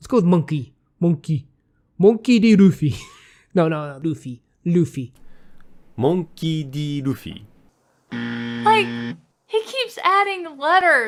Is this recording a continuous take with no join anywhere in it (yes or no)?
yes